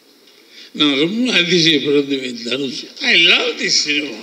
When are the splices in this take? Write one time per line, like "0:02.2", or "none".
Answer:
0:02.9